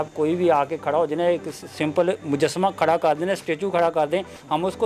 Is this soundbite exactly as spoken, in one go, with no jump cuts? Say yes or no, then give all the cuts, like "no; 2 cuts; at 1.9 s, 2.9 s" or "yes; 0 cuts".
yes; 0 cuts